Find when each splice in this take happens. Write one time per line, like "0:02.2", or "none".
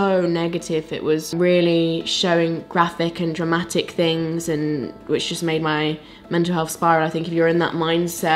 0:01.3